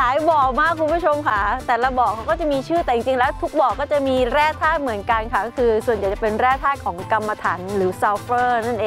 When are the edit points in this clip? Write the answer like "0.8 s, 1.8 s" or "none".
none